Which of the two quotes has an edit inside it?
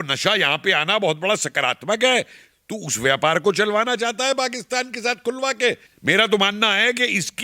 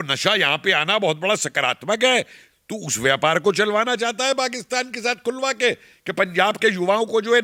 first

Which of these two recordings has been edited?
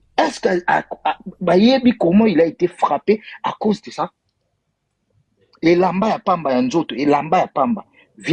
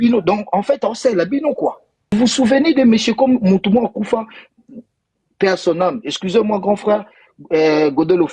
second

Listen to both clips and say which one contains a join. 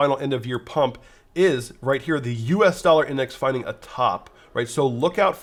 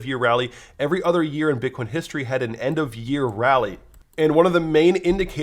second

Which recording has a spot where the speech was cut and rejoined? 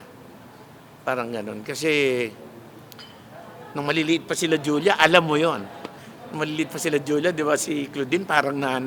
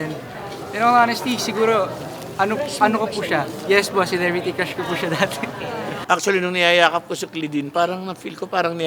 second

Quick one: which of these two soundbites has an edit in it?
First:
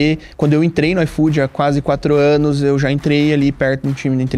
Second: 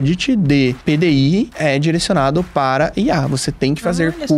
second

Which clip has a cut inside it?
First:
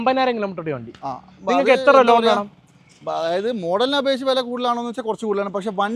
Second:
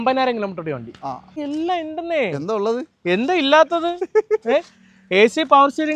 second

